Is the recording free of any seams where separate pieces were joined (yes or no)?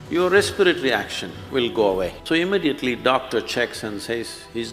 no